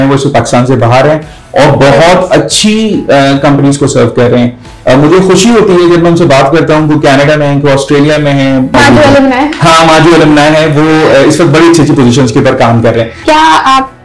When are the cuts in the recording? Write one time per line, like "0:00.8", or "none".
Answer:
0:08.7
0:13.2